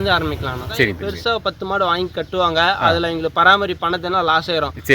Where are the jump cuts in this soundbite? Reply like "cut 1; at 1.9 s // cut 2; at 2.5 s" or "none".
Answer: cut 1; at 1.4 s